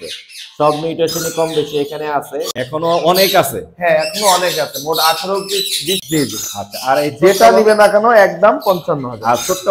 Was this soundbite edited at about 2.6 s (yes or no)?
yes